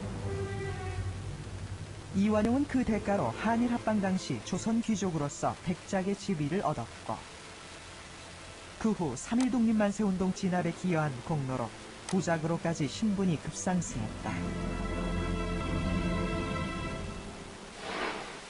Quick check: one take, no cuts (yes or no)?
no